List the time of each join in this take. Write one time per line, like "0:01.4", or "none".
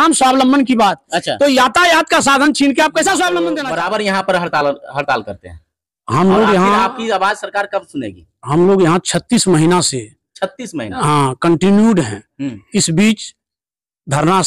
0:03.6